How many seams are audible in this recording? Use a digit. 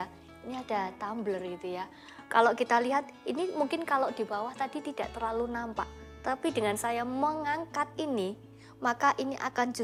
0